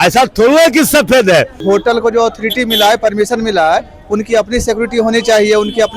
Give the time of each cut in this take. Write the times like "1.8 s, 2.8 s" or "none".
1.6 s